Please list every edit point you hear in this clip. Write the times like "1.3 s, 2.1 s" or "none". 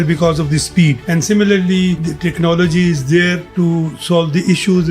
1.0 s, 2.1 s, 3.4 s